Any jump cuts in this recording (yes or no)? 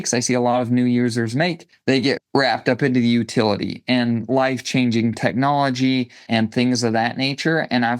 yes